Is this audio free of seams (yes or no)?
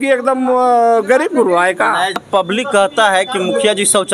no